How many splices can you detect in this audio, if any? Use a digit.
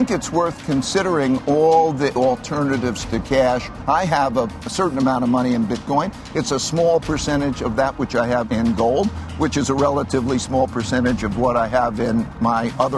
4